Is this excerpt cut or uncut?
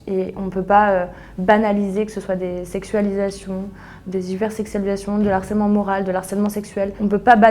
uncut